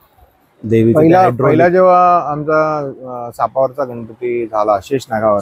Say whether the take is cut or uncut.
uncut